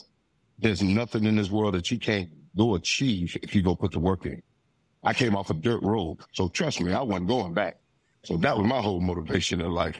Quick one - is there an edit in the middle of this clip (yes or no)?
yes